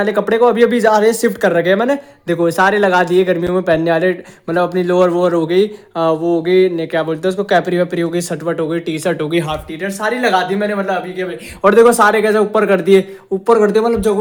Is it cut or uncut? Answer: uncut